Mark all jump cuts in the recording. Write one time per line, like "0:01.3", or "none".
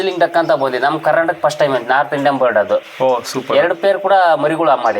0:02.9